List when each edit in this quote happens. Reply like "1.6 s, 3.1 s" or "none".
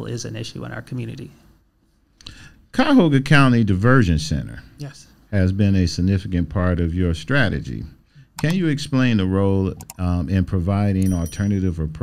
none